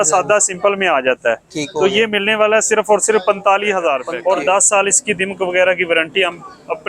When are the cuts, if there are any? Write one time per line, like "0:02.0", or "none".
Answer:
0:04.1